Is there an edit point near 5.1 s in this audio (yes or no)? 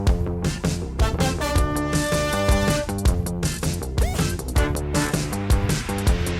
yes